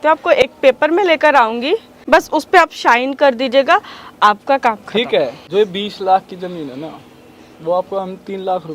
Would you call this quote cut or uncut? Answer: cut